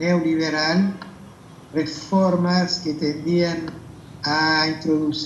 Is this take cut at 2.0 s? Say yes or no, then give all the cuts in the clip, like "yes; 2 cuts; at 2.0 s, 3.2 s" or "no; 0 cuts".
no; 1 cut; at 3.7 s